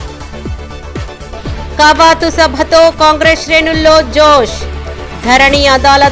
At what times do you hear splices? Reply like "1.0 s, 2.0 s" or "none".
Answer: 1.3 s